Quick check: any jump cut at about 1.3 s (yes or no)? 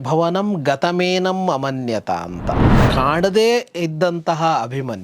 no